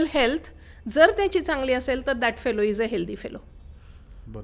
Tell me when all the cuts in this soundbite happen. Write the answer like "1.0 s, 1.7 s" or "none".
none